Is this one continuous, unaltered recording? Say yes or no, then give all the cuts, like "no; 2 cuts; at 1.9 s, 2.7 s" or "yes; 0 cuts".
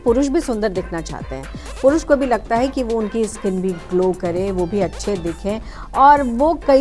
yes; 0 cuts